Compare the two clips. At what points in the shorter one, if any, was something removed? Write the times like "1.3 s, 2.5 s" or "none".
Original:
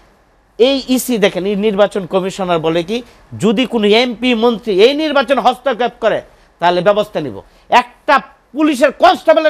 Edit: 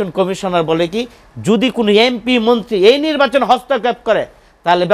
none